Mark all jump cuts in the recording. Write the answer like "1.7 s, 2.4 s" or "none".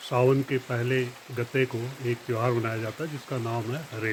none

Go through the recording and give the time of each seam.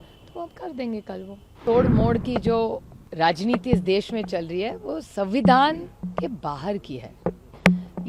1.6 s

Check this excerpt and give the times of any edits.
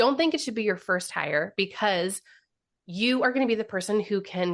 none

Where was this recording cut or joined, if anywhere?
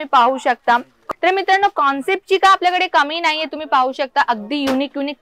1.0 s

